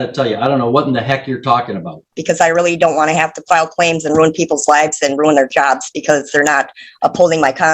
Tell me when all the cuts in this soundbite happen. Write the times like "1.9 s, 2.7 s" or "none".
2.1 s